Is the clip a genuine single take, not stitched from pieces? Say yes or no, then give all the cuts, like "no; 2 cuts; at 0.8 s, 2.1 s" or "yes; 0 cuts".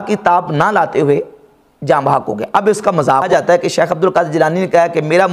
no; 1 cut; at 3.3 s